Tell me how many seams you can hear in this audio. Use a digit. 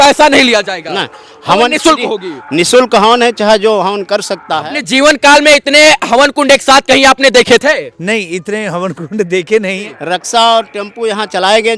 2